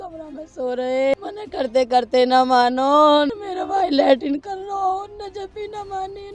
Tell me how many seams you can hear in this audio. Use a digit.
2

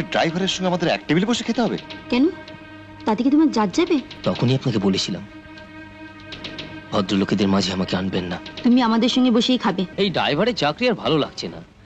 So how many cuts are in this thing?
2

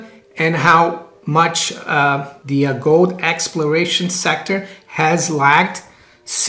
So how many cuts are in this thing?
2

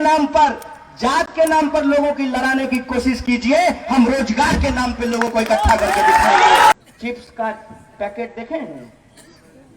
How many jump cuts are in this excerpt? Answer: 1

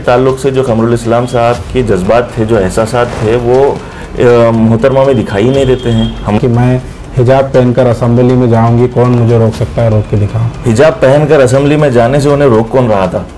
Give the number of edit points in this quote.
2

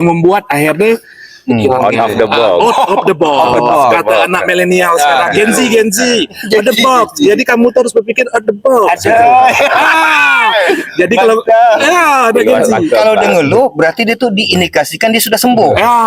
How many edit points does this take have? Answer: 2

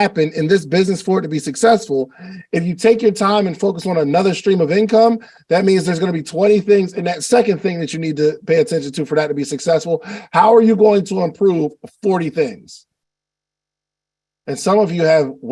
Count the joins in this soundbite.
0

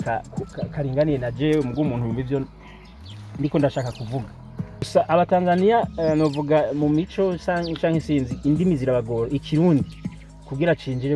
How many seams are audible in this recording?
1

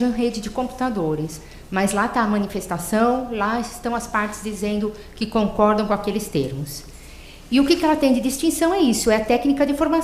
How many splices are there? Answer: 1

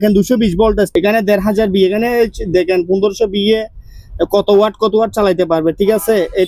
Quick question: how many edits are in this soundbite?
1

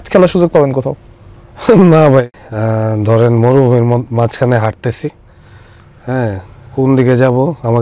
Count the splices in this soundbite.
1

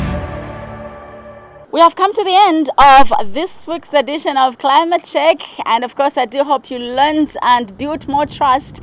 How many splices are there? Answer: 0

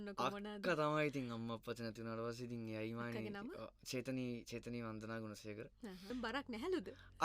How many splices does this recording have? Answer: 1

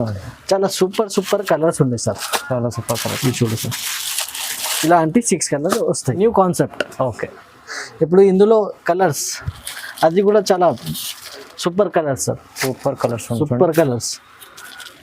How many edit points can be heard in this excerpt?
1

